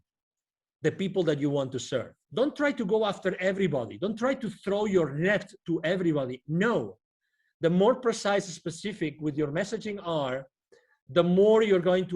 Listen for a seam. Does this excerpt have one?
yes; 1 cut; at 2.2 s

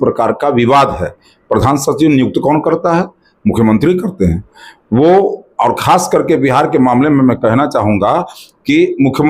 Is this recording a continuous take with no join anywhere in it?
yes; 0 cuts

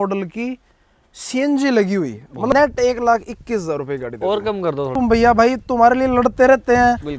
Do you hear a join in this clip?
yes; 2 cuts; at 2.5 s, 4.9 s

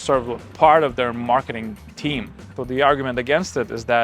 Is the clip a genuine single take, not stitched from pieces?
no; 1 cut; at 2.6 s

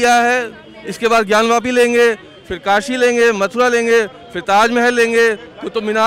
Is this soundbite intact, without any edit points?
yes; 0 cuts

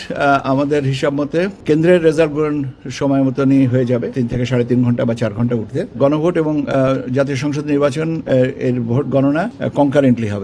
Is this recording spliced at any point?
yes; 4 cuts; at 1.6 s, 4.1 s, 6.0 s, 9.6 s

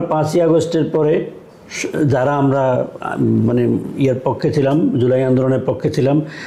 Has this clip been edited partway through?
no; 0 cuts

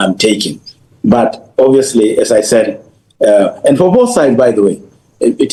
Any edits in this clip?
no; 0 cuts

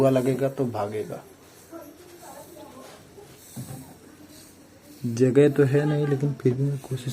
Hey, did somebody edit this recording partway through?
no; 0 cuts

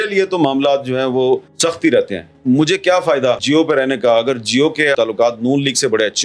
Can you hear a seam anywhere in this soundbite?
yes; 3 cuts; at 1.5 s, 3.4 s, 4.9 s

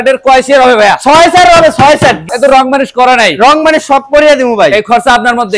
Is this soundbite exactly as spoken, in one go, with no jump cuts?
no; 1 cut; at 2.3 s

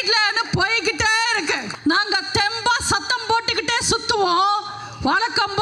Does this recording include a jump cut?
yes; 1 cut; at 1.7 s

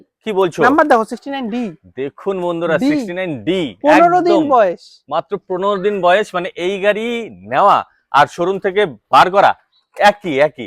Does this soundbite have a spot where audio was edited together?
no; 0 cuts

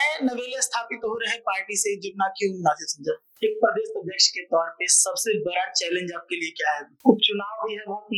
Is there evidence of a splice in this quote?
yes; 2 cuts; at 3.3 s, 6.9 s

